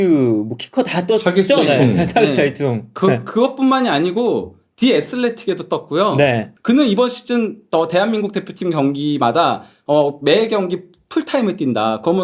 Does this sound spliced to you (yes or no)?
yes